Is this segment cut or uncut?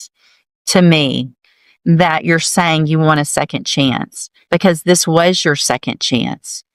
uncut